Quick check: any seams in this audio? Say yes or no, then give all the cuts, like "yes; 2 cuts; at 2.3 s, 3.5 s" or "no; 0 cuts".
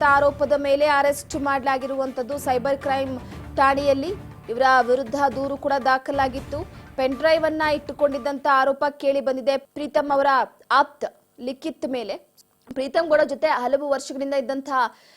yes; 2 cuts; at 9.7 s, 12.3 s